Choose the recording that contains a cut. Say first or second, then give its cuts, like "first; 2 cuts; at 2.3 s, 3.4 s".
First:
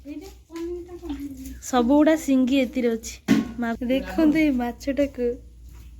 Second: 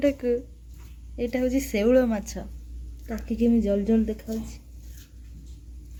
first; 1 cut; at 3.8 s